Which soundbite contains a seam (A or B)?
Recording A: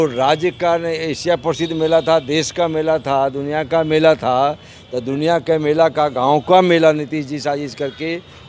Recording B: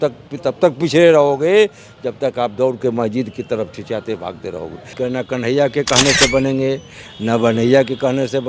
B